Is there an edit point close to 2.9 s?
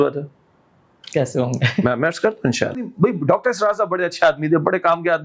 yes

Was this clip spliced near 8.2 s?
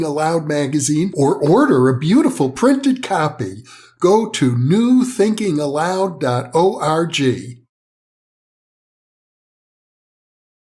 no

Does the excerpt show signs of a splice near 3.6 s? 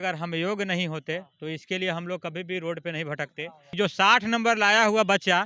yes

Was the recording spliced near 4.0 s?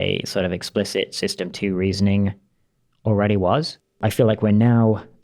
yes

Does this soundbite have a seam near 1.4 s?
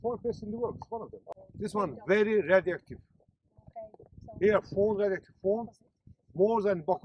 yes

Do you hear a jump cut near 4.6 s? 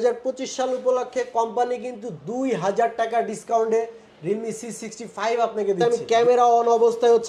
no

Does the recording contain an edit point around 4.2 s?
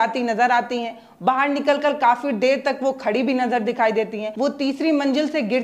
yes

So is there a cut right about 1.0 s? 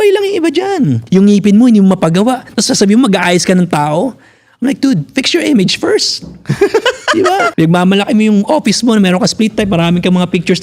yes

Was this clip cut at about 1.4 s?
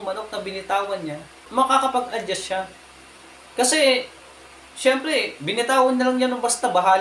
yes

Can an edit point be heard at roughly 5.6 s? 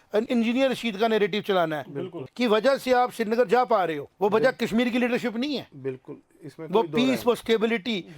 no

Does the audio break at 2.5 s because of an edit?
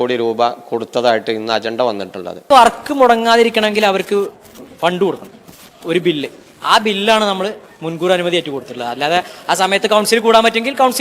yes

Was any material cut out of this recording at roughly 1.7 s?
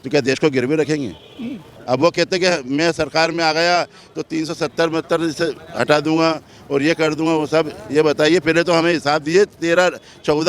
yes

